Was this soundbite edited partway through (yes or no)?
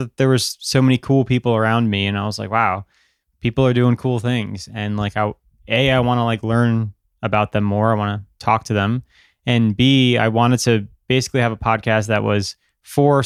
no